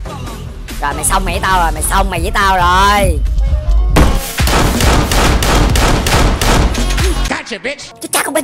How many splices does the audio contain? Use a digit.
1